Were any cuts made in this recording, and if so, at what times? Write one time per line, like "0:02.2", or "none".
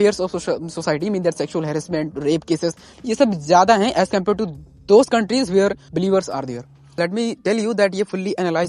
0:06.9